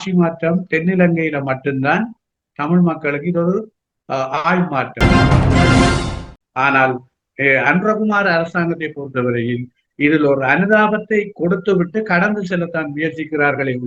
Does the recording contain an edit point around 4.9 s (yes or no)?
yes